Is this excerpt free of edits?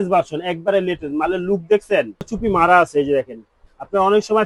no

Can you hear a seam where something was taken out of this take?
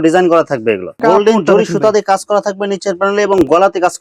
yes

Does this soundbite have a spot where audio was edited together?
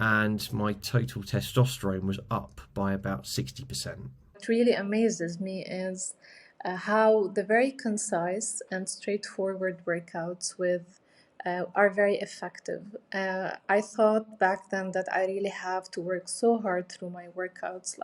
yes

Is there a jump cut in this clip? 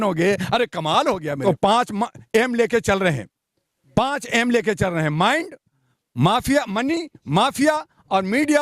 yes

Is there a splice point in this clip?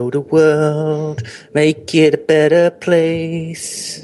no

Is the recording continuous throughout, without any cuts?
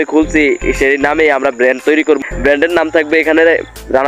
no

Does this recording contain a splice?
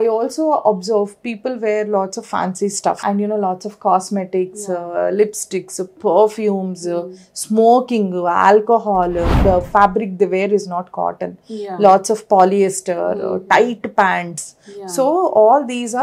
yes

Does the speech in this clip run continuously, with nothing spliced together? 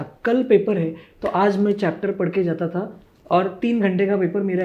yes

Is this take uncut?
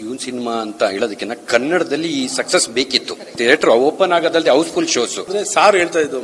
no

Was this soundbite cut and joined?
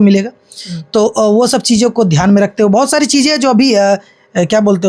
no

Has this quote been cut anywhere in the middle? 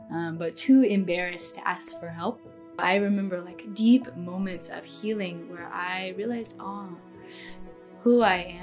yes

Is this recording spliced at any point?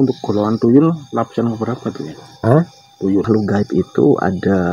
yes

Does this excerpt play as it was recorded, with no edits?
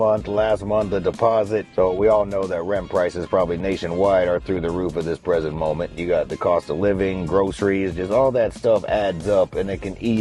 no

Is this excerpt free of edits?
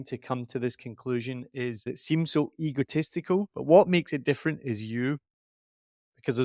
no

